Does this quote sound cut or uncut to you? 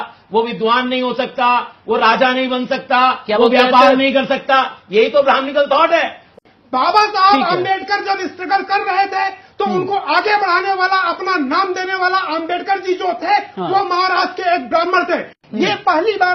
cut